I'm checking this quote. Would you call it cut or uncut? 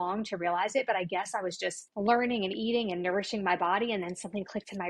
cut